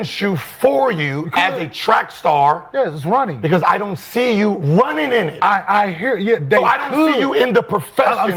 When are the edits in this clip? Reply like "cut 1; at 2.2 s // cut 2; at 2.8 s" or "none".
none